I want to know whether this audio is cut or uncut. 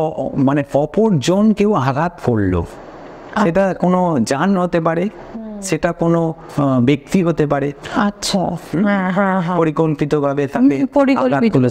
uncut